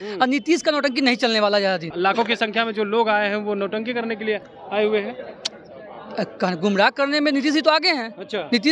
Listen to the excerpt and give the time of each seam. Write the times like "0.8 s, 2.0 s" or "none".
1.9 s

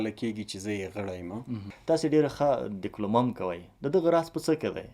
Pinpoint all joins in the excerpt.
1.7 s

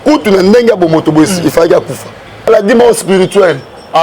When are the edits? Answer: 2.5 s

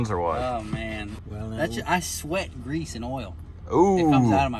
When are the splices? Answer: 1.1 s

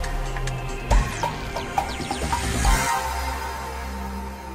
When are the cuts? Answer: none

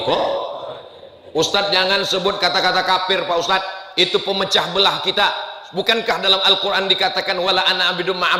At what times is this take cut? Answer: none

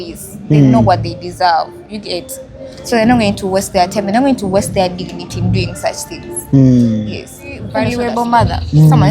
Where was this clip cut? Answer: 7.6 s

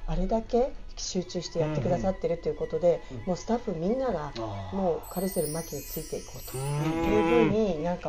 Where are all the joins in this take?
none

